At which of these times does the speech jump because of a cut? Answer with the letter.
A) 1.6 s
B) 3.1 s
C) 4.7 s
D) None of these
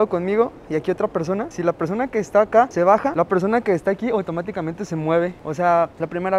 D